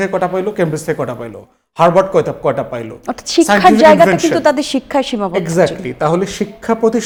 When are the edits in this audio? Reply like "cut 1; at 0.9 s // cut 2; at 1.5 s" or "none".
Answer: none